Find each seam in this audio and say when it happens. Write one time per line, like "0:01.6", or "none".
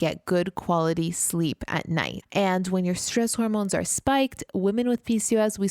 0:02.2